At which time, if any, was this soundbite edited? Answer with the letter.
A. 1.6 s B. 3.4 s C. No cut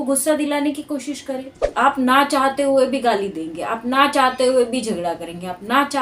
A